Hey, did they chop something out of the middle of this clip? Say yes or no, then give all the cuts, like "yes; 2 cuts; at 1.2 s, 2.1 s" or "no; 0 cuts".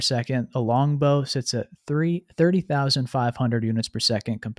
no; 0 cuts